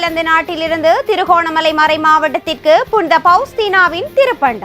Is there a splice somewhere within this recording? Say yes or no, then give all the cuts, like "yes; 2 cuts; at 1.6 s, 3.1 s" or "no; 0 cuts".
no; 0 cuts